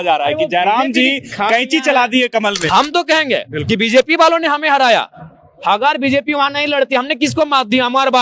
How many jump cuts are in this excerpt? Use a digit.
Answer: 1